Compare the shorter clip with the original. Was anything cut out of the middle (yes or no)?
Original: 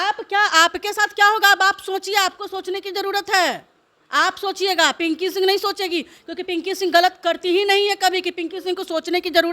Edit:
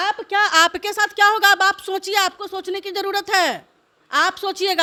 no